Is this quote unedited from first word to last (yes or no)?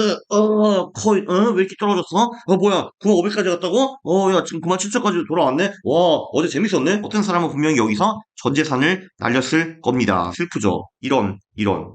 no